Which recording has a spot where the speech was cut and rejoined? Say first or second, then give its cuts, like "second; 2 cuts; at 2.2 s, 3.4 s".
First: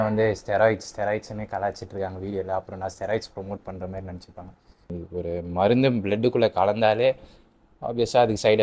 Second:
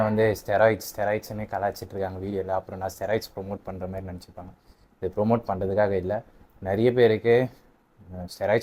first; 1 cut; at 4.9 s